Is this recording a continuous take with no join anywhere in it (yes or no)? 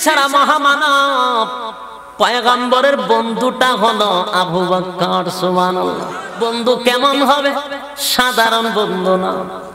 no